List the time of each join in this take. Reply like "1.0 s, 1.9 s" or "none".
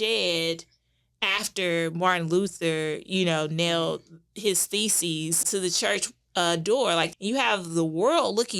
5.4 s, 7.1 s